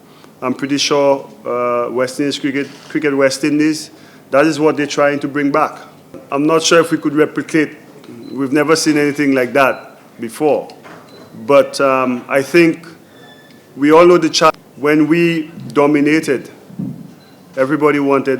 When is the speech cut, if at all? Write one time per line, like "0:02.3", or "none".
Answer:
0:06.2
0:14.5